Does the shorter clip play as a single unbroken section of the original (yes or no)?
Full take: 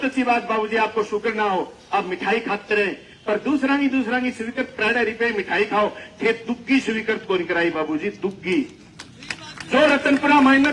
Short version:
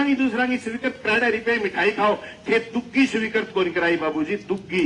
yes